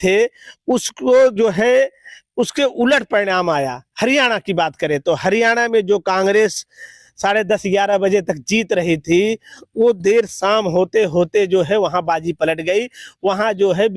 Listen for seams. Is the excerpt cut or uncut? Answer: uncut